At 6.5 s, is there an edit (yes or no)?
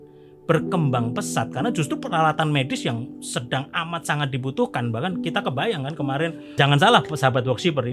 yes